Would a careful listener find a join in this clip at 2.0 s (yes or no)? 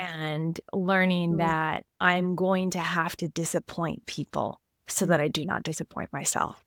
no